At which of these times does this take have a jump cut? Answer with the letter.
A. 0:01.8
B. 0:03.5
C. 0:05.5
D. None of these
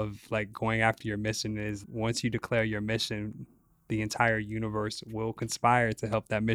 A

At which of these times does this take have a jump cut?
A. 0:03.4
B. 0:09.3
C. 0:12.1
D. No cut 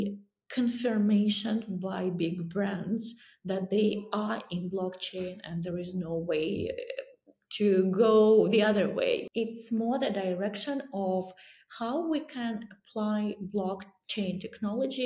B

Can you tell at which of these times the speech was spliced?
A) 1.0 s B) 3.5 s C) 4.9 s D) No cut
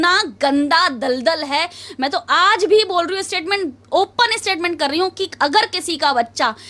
D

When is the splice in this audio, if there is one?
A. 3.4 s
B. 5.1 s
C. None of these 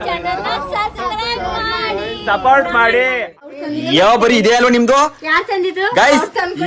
A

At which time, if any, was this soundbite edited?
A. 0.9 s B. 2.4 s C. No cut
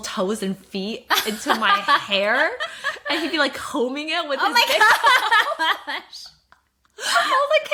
C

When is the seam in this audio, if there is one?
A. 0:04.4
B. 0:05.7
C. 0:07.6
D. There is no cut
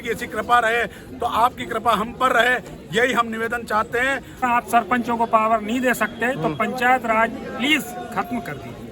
A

